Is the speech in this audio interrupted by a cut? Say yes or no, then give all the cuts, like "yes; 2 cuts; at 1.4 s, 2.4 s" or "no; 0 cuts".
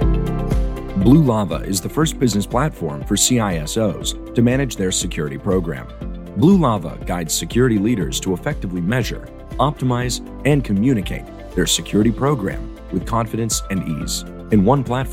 yes; 1 cut; at 0.9 s